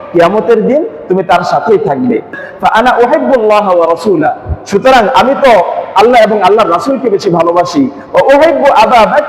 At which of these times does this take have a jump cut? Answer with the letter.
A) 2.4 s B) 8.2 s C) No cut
A